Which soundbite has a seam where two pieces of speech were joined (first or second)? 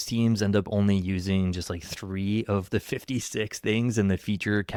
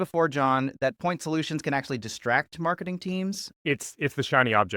second